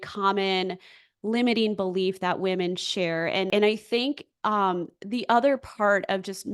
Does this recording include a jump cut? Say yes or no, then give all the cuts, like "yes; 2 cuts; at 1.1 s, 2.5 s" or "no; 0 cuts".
yes; 1 cut; at 3.5 s